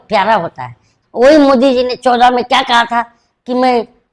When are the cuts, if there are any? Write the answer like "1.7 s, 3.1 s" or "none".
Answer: 0.9 s